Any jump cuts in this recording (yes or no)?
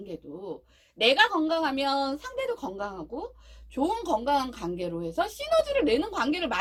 no